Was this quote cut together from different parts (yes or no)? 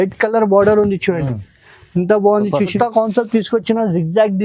yes